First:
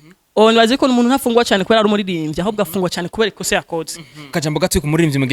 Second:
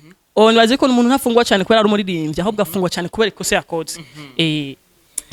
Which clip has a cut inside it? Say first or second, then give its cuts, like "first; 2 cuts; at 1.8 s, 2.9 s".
first; 1 cut; at 4.3 s